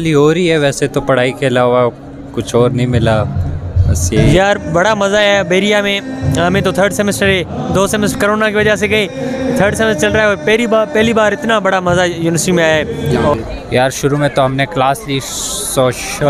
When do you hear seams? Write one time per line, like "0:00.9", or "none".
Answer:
0:04.2
0:13.3